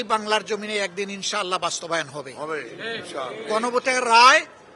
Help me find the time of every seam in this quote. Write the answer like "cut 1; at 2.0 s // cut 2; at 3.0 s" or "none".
none